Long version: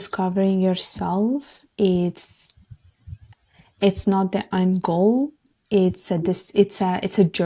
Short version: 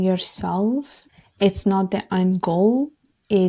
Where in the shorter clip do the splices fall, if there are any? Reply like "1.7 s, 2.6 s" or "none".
1.0 s